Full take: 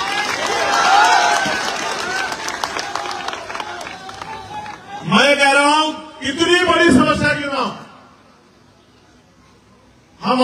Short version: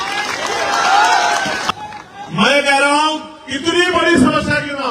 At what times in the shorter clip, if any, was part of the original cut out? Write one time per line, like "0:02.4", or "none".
0:01.7